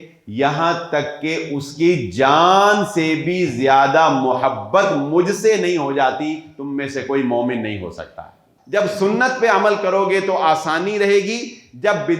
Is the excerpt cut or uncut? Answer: cut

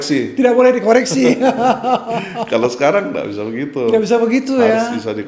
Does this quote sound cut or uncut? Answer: uncut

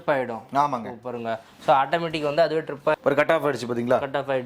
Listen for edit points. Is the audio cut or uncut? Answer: cut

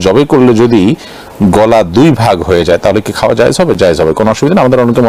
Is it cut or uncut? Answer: uncut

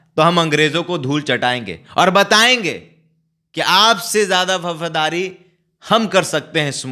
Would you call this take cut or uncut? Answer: uncut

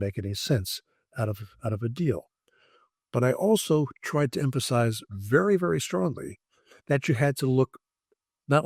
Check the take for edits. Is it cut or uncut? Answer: uncut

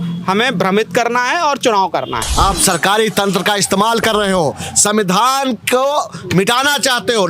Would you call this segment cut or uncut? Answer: cut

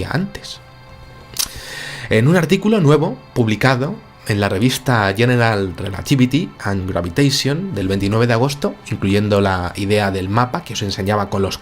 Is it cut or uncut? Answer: cut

